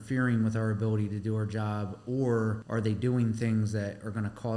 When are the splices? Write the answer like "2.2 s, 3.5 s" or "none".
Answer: 2.6 s